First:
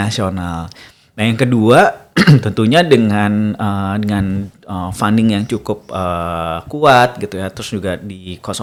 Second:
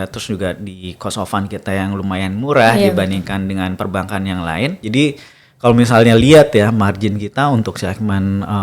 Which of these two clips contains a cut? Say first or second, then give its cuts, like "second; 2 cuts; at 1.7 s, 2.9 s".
second; 1 cut; at 4.8 s